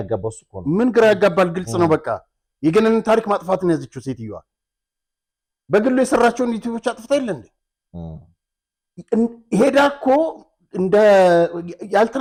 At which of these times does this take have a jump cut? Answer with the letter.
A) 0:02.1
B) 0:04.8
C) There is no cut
C